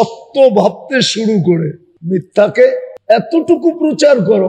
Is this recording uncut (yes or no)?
no